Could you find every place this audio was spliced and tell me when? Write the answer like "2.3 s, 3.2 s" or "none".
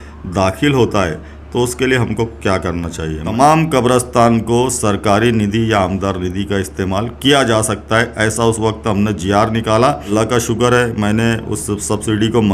3.3 s, 10.0 s